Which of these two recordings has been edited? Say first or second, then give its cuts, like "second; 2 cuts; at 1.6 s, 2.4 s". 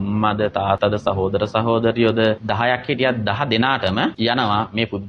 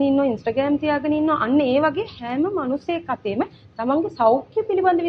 first; 3 cuts; at 0.8 s, 2.4 s, 4.2 s